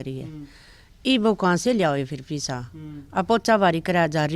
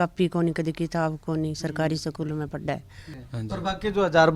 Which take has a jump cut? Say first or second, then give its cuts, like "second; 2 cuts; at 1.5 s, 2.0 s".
second; 1 cut; at 3.0 s